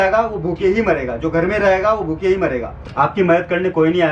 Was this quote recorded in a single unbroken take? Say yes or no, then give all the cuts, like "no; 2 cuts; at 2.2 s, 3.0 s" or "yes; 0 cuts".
no; 1 cut; at 2.8 s